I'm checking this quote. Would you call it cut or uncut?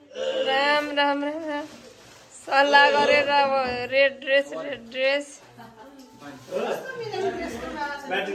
uncut